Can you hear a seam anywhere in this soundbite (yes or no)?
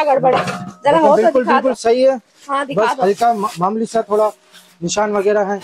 no